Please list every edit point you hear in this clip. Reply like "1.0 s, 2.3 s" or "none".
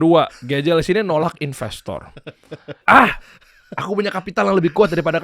2.8 s